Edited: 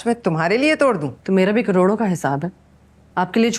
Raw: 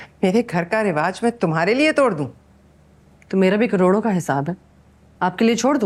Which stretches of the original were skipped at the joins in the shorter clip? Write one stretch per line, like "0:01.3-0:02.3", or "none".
0:02.3-0:03.2